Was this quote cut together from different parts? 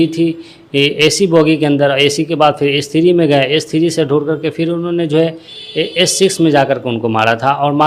no; 0 cuts

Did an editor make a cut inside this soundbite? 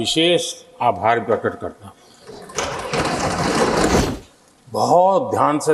yes; 1 cut; at 4.0 s

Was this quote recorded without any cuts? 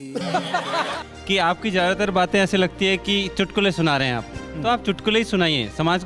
no; 1 cut; at 1.1 s

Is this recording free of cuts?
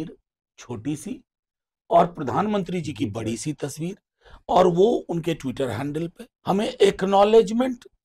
no; 1 cut; at 6.2 s

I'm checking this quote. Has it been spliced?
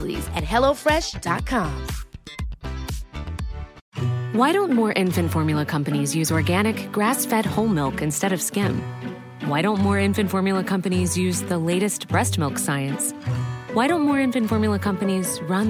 yes; 1 cut; at 3.8 s

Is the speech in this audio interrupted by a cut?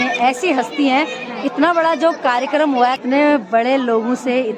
yes; 1 cut; at 3.0 s

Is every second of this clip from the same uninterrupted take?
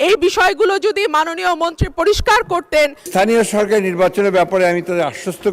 no; 1 cut; at 3.1 s

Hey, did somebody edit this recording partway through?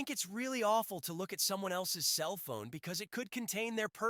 no; 0 cuts

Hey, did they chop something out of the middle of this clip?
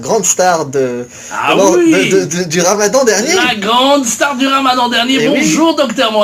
yes; 1 cut; at 4.7 s

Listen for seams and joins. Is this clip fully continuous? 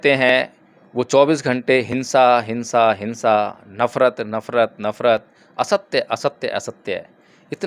yes; 0 cuts

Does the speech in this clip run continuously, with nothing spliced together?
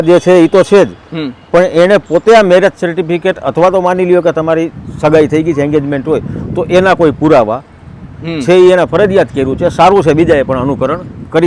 yes; 0 cuts

